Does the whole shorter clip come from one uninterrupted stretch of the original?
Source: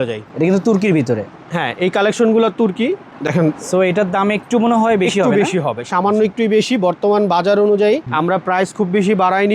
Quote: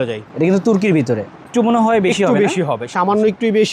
no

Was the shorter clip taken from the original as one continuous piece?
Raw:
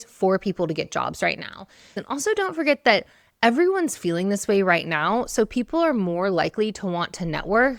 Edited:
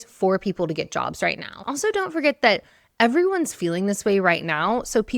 no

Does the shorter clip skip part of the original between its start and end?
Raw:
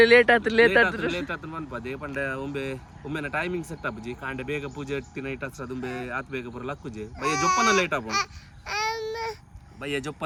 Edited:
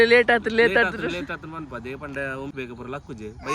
yes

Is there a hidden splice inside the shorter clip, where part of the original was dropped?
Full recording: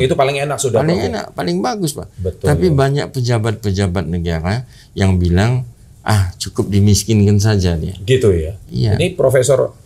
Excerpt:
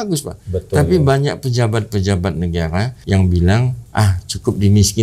yes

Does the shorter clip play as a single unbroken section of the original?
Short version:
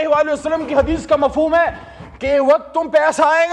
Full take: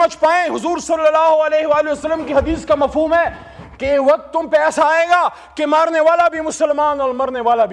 yes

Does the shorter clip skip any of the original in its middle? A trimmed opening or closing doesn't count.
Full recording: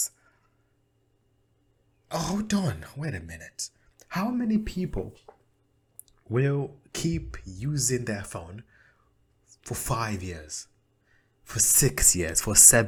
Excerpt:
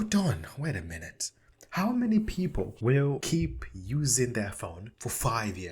yes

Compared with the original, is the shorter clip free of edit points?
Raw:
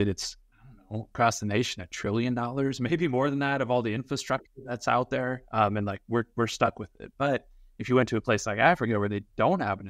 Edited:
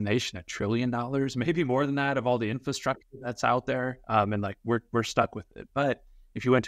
yes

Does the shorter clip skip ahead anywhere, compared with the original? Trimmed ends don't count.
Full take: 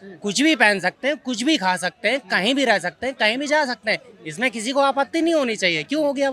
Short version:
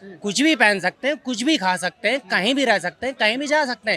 no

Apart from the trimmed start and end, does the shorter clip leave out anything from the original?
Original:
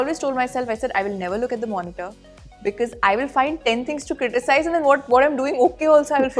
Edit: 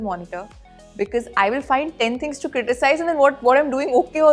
no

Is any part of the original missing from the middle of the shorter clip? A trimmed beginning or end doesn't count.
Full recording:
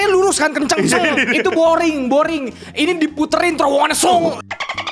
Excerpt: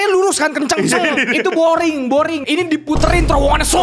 yes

